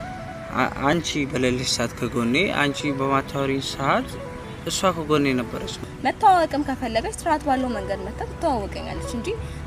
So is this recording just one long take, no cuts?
no; 1 cut; at 5.7 s

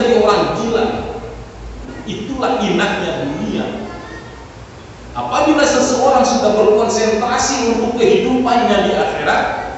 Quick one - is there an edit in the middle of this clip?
yes; 1 cut; at 1.9 s

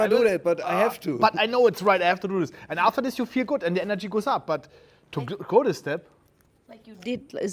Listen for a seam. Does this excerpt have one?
no; 0 cuts

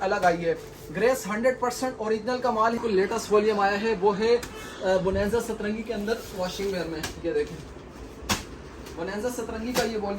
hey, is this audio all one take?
no; 1 cut; at 2.8 s

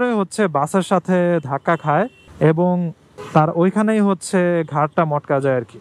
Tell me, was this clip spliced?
no; 0 cuts

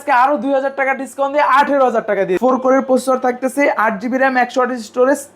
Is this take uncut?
no; 1 cut; at 2.3 s

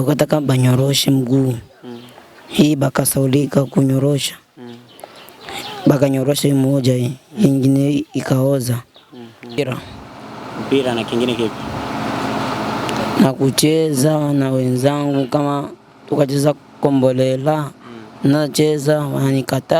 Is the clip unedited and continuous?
no; 1 cut; at 9.6 s

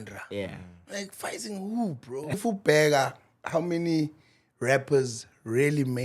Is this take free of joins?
no; 1 cut; at 2.4 s

